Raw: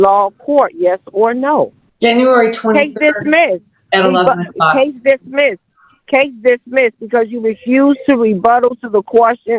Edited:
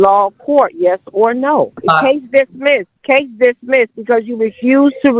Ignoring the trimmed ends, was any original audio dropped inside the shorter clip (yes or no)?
yes